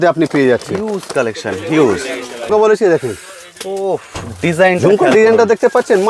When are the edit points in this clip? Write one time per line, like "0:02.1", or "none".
0:02.5